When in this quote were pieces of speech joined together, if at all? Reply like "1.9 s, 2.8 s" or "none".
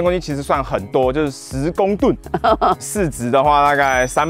2.8 s